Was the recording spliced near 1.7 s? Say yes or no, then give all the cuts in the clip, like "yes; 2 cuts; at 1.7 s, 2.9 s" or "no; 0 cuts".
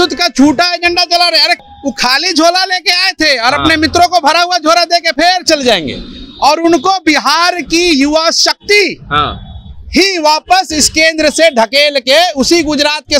yes; 1 cut; at 1.7 s